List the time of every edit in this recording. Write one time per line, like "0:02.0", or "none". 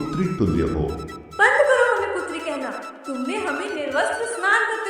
0:01.2